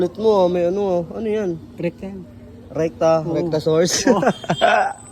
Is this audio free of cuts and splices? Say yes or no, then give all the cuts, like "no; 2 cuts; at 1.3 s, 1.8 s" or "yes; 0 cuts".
yes; 0 cuts